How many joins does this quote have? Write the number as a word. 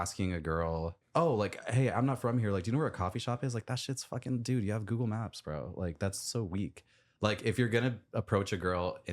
one